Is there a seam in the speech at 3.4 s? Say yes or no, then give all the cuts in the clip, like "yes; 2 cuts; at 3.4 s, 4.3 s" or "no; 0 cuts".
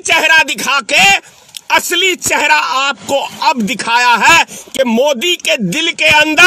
no; 0 cuts